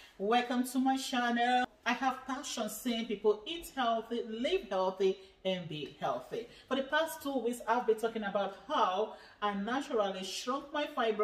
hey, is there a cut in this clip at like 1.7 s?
yes; 1 cut; at 1.7 s

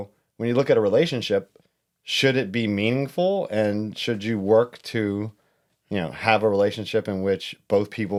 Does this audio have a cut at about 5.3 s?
no; 0 cuts

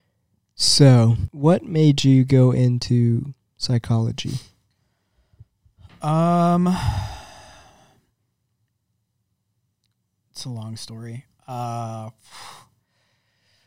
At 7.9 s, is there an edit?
no; 1 cut; at 1.2 s

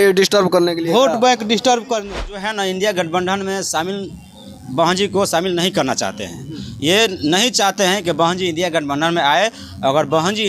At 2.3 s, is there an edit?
yes; 1 cut; at 2.3 s

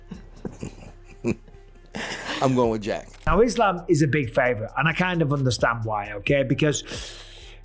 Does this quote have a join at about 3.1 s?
yes; 1 cut; at 3.1 s

